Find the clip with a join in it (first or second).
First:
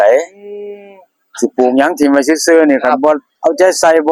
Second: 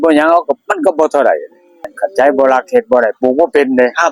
second